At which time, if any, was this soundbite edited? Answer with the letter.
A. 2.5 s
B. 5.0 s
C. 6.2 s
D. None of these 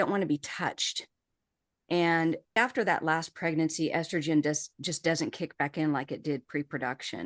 A